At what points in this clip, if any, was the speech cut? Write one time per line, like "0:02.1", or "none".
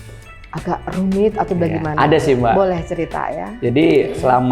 none